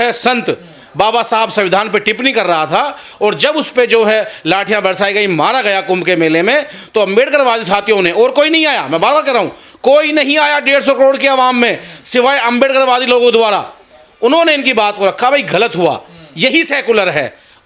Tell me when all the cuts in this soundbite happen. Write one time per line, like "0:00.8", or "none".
none

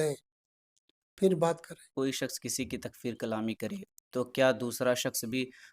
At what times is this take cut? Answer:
0:01.9

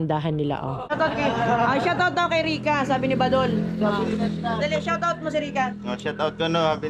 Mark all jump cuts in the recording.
0:00.9

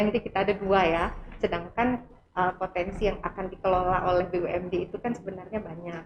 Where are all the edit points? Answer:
none

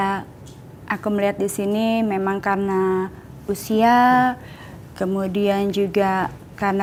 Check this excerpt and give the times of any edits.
none

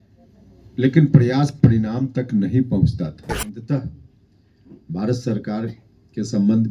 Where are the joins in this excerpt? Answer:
0:03.4

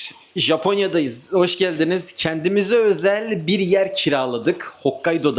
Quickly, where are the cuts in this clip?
none

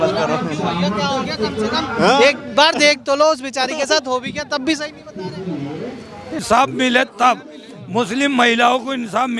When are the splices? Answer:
0:06.4

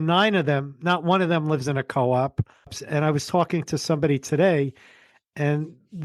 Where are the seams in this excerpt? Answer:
0:02.8

